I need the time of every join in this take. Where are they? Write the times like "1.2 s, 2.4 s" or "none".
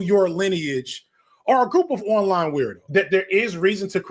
2.8 s